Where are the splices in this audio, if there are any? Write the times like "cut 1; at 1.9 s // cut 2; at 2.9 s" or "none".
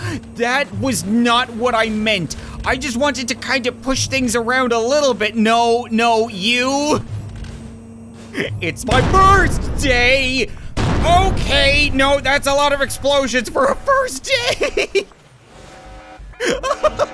cut 1; at 16.2 s